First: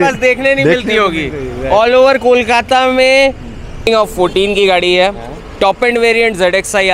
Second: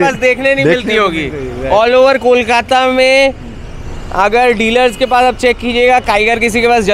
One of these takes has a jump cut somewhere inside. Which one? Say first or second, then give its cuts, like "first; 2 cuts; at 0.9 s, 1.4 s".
first; 1 cut; at 3.9 s